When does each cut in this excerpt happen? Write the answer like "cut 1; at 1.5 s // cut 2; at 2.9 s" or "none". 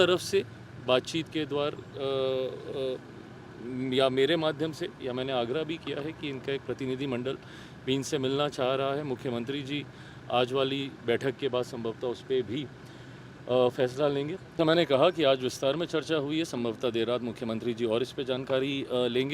cut 1; at 14.4 s